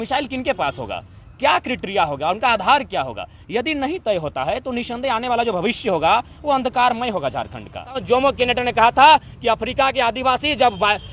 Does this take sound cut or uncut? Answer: cut